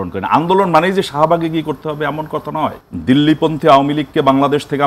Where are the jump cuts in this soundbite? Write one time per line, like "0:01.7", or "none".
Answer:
0:02.8